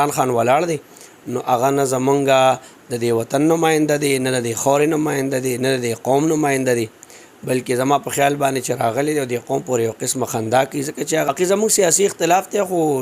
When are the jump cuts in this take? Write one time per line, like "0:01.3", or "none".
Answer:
0:11.3